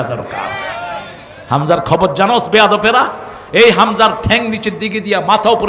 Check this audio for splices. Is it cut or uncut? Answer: uncut